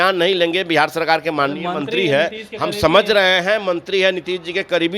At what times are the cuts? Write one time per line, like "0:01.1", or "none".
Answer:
none